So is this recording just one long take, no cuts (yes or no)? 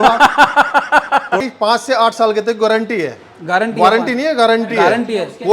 no